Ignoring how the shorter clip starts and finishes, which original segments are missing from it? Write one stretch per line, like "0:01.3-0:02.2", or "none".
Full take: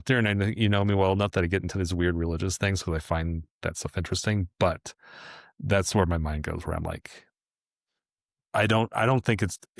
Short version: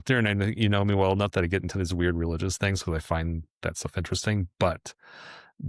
none